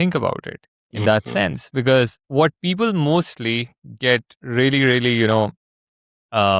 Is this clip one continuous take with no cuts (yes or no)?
no